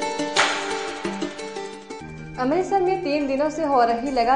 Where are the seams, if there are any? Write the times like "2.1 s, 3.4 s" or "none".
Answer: 1.5 s